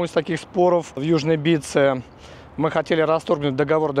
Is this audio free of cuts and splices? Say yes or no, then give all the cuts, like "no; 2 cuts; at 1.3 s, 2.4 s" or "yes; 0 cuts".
yes; 0 cuts